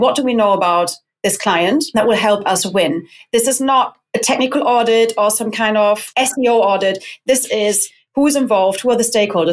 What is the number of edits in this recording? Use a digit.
2